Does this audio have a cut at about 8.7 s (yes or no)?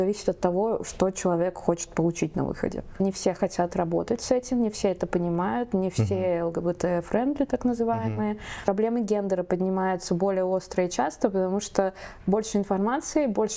yes